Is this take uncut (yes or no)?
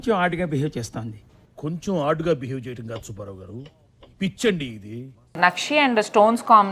no